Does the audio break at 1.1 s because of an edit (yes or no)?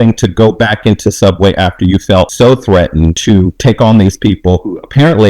no